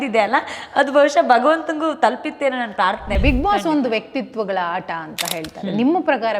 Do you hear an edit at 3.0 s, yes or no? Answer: yes